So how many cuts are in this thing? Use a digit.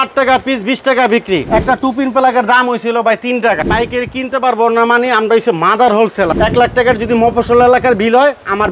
3